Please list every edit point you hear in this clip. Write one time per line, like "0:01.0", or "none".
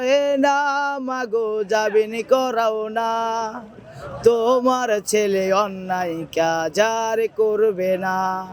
none